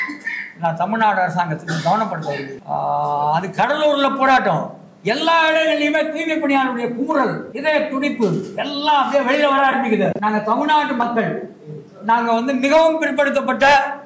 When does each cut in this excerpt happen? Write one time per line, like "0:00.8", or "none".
0:02.6
0:10.2